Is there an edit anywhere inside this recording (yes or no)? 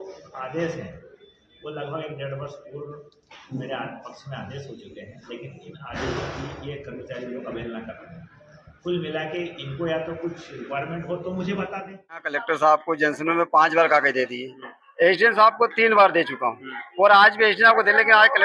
yes